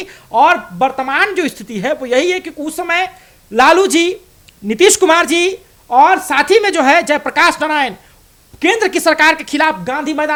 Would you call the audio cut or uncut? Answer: uncut